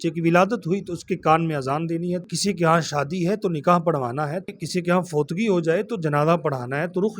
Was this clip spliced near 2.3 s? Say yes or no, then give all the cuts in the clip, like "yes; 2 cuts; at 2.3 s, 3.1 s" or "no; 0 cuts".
yes; 2 cuts; at 2.3 s, 4.5 s